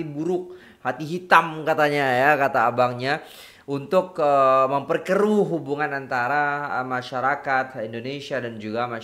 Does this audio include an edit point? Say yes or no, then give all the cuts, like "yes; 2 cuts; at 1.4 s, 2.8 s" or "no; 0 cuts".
no; 0 cuts